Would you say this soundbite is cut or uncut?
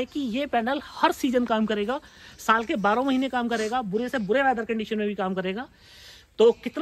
uncut